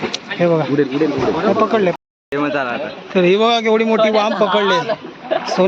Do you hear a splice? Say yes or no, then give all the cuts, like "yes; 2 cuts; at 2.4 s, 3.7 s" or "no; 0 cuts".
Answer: yes; 1 cut; at 2.0 s